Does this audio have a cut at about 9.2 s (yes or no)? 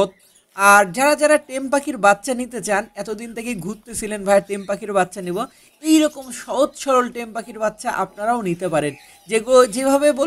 no